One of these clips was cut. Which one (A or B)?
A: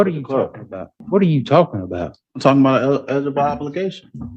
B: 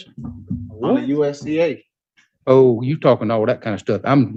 A